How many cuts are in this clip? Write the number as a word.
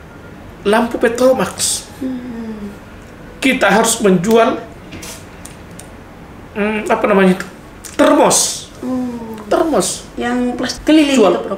one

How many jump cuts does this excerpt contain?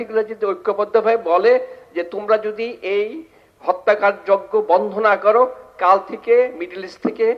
zero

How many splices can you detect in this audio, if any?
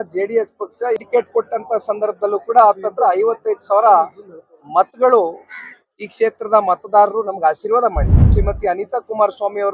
two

